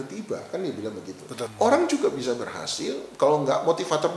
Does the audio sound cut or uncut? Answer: cut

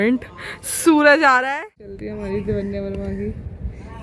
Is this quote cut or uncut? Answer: cut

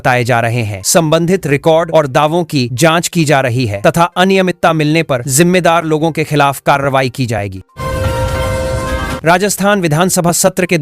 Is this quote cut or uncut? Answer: cut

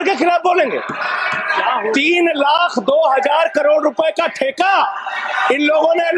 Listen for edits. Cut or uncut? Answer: uncut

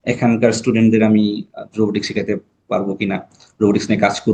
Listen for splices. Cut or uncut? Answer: uncut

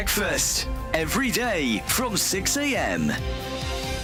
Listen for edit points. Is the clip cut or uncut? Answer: uncut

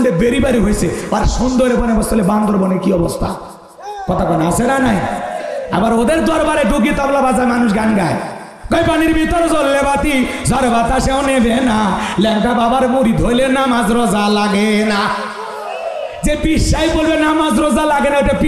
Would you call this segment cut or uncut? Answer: uncut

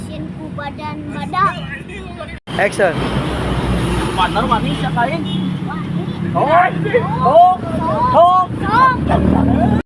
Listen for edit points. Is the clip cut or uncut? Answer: uncut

